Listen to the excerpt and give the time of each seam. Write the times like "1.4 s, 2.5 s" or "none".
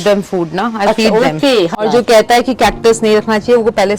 1.7 s